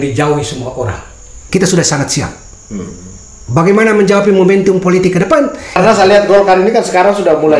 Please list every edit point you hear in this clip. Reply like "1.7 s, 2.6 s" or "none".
1.4 s, 5.8 s